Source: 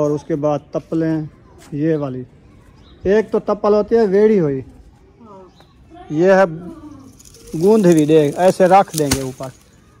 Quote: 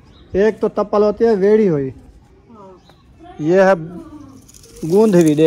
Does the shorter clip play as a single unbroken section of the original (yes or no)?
yes